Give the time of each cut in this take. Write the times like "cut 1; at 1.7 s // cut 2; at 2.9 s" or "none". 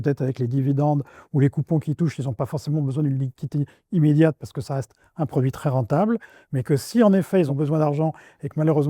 cut 1; at 7.5 s